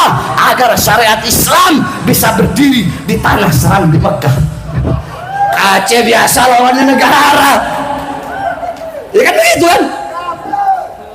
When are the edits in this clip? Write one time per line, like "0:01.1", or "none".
0:04.7

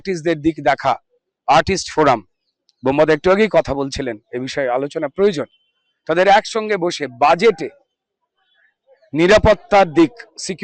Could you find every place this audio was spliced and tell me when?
none

